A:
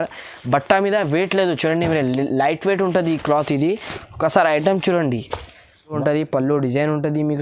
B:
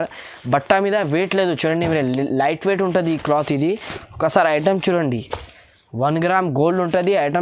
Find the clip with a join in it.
A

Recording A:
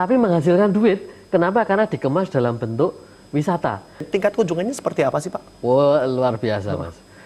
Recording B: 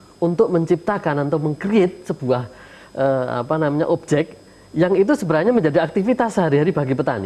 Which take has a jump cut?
A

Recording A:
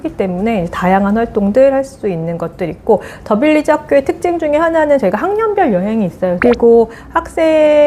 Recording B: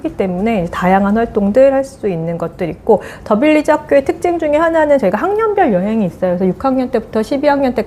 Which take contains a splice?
A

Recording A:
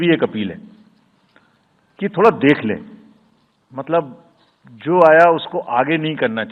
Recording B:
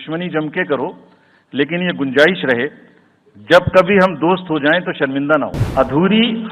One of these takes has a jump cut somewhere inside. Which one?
B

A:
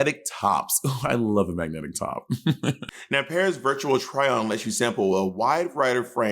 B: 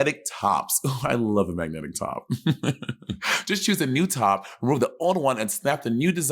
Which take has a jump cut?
A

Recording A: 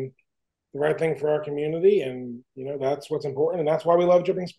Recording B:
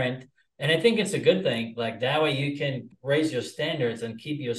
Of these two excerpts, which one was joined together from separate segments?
B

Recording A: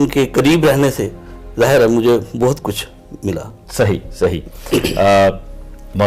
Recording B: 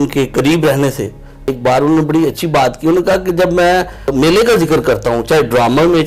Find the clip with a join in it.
B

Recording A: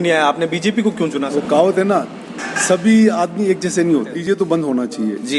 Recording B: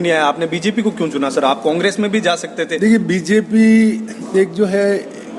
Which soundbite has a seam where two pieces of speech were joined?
A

